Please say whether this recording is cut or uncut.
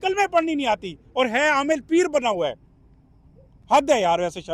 uncut